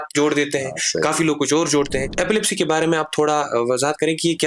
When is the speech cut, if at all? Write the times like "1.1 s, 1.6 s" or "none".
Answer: 2.1 s